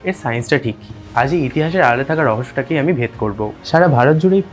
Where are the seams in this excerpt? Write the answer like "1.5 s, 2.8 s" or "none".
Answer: 3.5 s